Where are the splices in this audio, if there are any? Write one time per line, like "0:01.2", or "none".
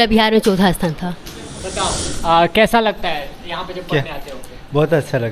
0:01.6